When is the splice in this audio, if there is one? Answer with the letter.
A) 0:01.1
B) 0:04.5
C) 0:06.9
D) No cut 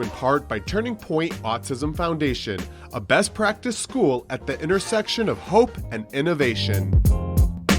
C